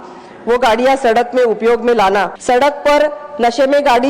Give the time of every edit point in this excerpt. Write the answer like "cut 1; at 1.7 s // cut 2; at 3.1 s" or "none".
cut 1; at 2.3 s